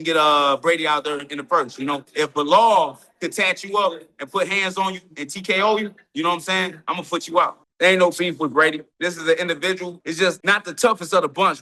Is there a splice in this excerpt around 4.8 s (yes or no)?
no